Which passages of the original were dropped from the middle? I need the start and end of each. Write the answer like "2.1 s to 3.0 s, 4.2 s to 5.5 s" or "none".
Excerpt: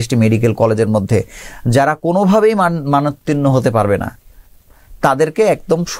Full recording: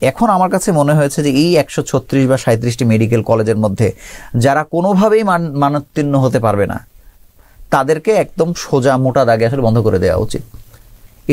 none

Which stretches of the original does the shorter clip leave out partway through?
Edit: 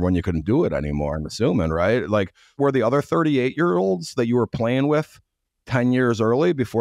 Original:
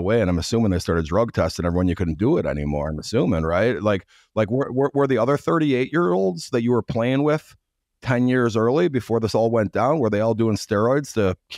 4.3 s to 4.9 s

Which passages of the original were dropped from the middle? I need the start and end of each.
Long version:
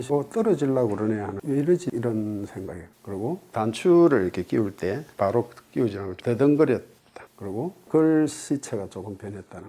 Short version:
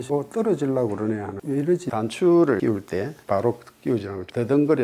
1.9 s to 3.5 s, 4.2 s to 4.5 s

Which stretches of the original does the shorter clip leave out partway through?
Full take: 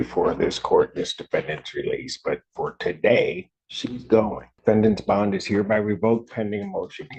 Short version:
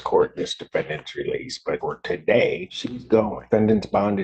2.4 s to 2.6 s, 4.0 s to 4.4 s

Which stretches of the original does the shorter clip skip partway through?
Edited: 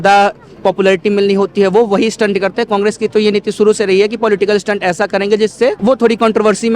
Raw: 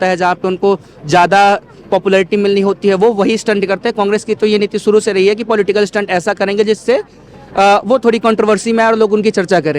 7.1 s to 7.8 s

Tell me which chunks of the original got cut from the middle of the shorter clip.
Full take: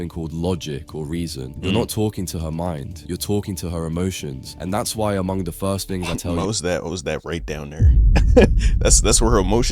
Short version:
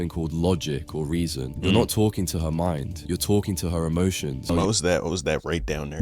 4.4 s to 6.2 s

